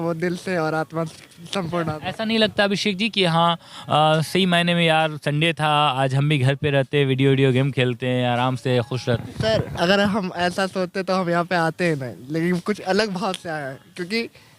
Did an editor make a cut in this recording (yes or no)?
no